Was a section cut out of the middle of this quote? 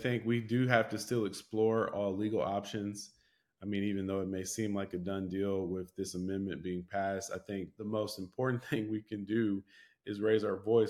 yes; 1 cut; at 7.8 s

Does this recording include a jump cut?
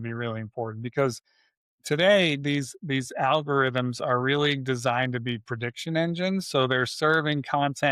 no; 0 cuts

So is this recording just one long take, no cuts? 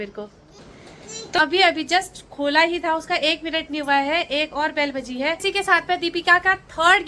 no; 2 cuts; at 1.4 s, 5.4 s

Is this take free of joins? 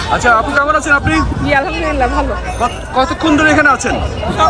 yes; 0 cuts

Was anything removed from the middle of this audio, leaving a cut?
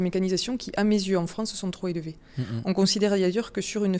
no; 0 cuts

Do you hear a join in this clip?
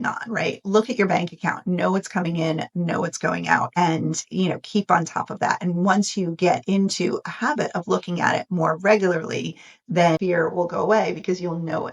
yes; 1 cut; at 10.2 s

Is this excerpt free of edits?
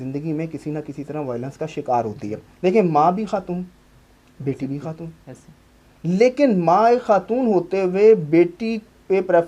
no; 1 cut; at 2.4 s

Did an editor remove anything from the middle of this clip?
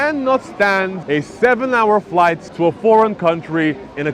yes; 2 cuts; at 1.0 s, 2.5 s

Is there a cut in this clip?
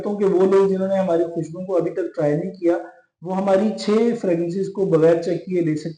no; 0 cuts

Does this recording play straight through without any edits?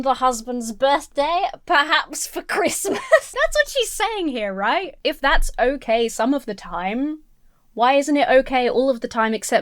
yes; 0 cuts

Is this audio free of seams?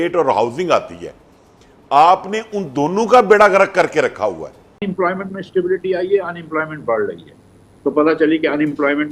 no; 1 cut; at 4.8 s

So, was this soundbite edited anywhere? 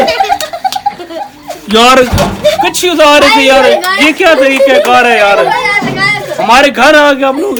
no; 0 cuts

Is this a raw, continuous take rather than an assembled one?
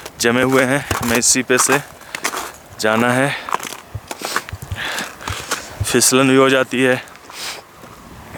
yes; 0 cuts

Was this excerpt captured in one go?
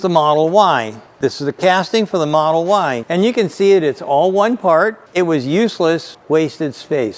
no; 2 cuts; at 3.0 s, 5.0 s

